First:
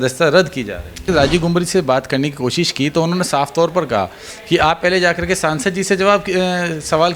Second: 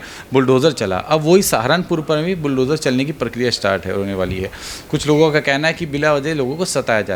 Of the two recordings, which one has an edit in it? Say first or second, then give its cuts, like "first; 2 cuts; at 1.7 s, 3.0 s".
first; 1 cut; at 1.1 s